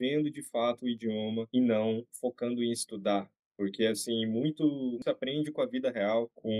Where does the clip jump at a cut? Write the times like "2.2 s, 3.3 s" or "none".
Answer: none